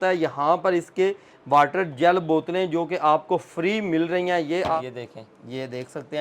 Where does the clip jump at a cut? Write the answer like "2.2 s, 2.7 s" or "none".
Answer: 4.8 s